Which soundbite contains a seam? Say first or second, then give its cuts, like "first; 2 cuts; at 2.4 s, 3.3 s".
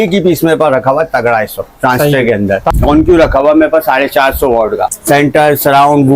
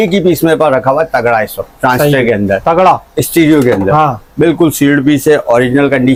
first; 2 cuts; at 2.7 s, 5.0 s